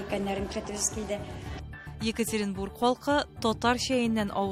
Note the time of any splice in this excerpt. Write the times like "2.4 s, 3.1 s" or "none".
none